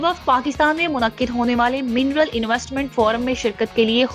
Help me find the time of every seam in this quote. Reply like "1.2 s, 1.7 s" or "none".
none